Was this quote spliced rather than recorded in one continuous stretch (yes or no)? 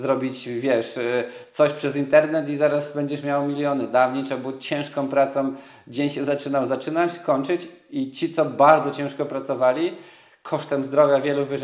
no